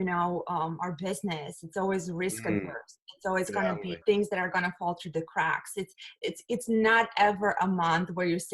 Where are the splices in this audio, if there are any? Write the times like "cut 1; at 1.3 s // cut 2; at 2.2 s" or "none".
cut 1; at 4.0 s